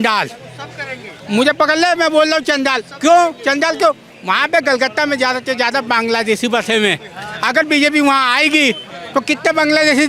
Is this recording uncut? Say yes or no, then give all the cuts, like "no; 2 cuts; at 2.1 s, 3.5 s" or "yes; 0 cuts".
yes; 0 cuts